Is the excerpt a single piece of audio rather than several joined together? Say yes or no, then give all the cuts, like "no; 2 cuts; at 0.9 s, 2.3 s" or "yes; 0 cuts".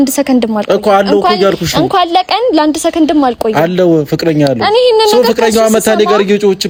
yes; 0 cuts